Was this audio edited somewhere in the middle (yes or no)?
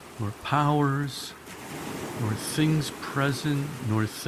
yes